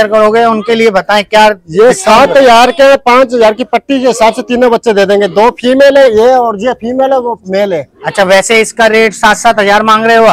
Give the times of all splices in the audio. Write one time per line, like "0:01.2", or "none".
none

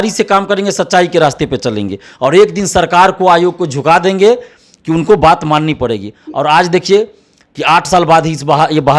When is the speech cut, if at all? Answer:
none

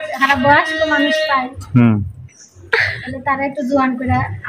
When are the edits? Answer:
none

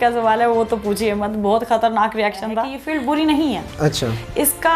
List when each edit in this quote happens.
0:02.8

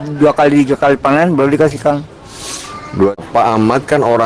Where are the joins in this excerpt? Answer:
0:03.2

